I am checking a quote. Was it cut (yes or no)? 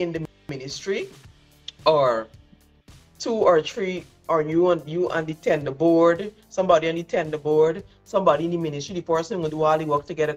no